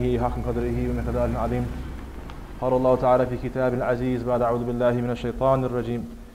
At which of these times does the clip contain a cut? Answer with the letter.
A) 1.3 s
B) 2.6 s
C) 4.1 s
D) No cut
A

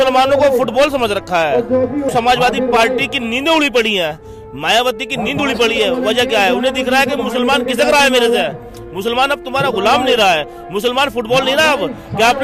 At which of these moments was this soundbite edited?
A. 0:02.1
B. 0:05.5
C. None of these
A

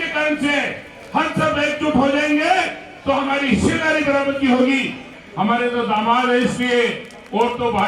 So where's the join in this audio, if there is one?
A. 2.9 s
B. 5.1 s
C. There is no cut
B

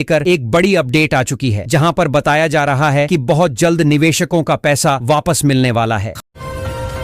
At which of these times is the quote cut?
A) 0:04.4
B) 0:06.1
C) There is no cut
B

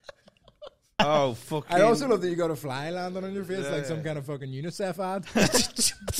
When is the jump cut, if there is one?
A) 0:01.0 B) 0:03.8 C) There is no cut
A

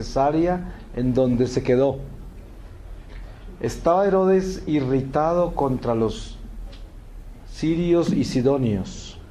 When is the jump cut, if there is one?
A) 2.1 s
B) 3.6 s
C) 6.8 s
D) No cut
B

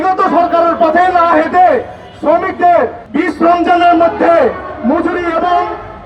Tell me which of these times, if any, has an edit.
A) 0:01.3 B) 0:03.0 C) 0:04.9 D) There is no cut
B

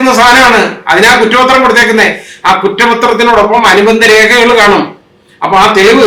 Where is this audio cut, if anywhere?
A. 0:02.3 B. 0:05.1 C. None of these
C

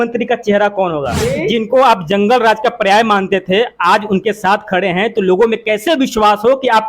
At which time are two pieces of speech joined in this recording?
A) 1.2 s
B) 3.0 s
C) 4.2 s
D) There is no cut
A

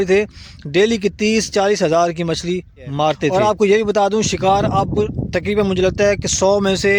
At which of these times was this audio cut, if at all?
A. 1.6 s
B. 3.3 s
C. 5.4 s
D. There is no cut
B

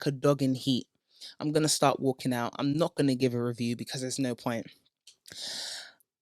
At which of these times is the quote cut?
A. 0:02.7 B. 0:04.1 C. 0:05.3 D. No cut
D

